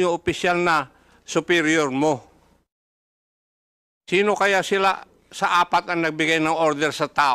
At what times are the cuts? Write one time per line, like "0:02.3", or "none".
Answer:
none